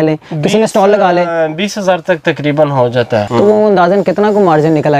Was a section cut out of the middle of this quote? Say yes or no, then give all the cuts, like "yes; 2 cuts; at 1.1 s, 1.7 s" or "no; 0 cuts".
yes; 1 cut; at 3.3 s